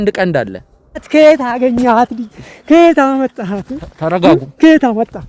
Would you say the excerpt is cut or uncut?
cut